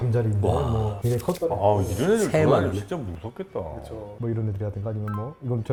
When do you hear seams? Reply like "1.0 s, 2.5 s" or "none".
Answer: none